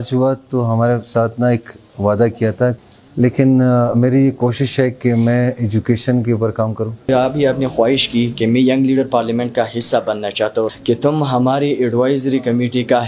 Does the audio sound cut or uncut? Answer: cut